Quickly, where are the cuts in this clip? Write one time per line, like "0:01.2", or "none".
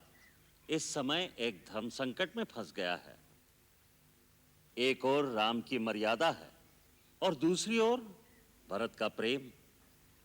0:04.7